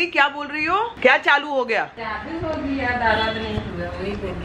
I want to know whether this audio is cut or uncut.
cut